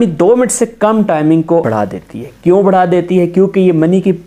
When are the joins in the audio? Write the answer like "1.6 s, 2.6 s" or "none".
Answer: 1.7 s